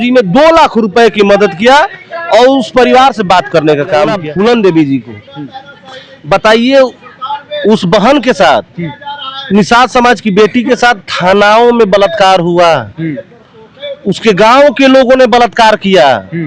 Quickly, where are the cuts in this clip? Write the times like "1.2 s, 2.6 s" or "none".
4.2 s